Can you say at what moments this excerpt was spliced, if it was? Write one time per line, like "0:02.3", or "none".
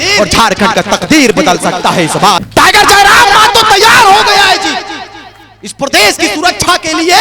0:02.4